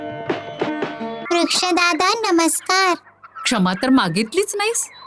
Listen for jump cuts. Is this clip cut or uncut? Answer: cut